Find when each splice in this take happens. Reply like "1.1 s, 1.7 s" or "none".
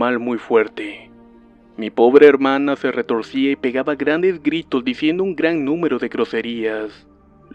6.0 s